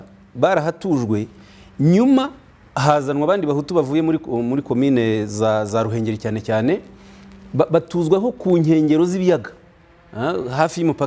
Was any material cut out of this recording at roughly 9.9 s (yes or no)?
no